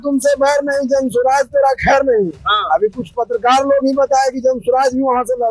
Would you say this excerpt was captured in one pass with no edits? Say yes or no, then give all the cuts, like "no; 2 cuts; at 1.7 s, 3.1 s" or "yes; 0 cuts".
yes; 0 cuts